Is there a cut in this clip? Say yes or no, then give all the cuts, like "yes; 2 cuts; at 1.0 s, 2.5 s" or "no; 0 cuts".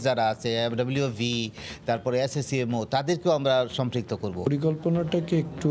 yes; 1 cut; at 4.5 s